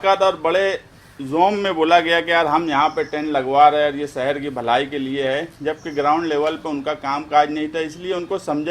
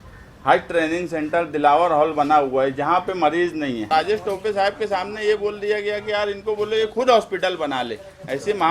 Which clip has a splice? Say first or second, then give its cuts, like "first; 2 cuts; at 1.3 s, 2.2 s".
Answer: second; 1 cut; at 3.9 s